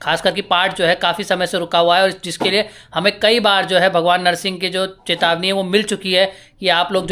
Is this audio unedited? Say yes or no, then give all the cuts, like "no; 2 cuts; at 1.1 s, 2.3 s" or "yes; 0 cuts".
yes; 0 cuts